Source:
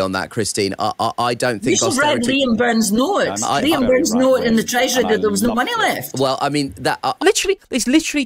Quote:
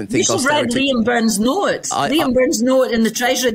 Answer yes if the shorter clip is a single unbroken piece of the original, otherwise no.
yes